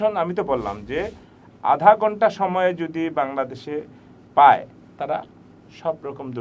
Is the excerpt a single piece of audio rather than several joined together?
yes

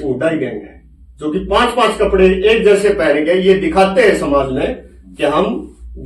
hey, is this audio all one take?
yes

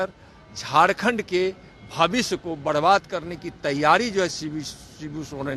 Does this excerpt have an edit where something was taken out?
no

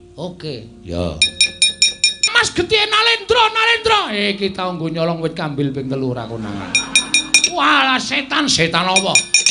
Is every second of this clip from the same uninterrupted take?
no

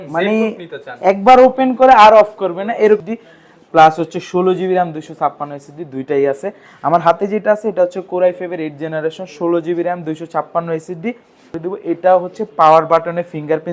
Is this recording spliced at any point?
yes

